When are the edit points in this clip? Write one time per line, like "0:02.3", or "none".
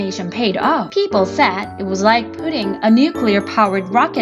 0:00.9
0:01.7